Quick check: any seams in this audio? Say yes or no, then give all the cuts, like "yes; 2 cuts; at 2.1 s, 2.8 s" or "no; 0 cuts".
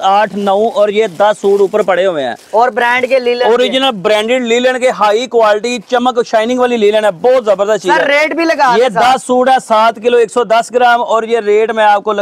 no; 0 cuts